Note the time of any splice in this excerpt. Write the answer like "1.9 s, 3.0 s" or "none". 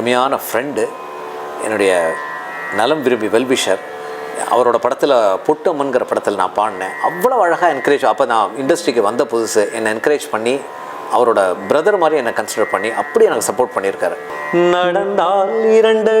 14.3 s